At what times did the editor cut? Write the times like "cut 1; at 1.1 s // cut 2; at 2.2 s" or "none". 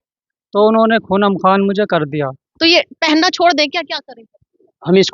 cut 1; at 2.4 s